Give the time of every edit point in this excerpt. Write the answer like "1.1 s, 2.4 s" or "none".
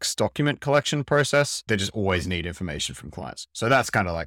1.7 s